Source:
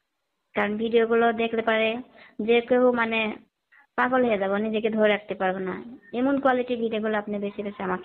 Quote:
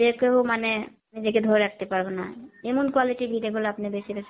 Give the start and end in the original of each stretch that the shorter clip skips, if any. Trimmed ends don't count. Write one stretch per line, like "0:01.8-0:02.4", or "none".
0:03.7-0:04.7